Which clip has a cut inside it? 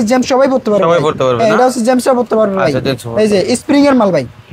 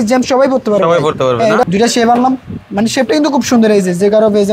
second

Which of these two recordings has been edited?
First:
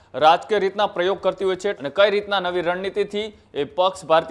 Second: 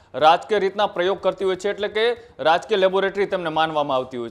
first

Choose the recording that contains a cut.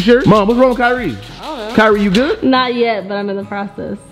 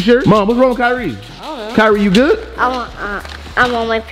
first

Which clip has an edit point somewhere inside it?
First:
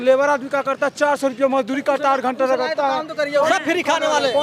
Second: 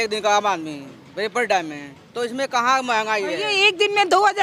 first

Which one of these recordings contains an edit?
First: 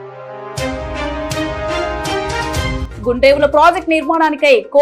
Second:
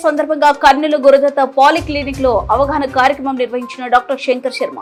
first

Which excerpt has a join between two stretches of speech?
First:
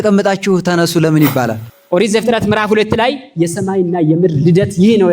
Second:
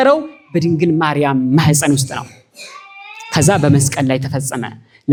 first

